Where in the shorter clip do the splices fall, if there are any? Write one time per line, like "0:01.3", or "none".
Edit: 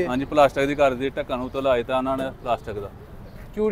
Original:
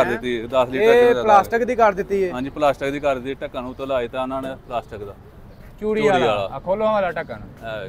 none